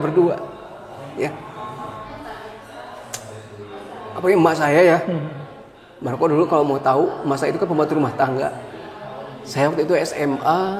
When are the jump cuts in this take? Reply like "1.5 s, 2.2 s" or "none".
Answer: 2.1 s